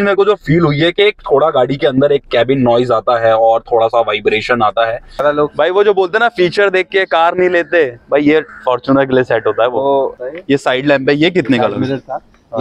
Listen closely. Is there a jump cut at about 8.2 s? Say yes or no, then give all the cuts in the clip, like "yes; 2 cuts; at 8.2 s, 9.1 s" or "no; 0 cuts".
no; 2 cuts; at 5.2 s, 10.1 s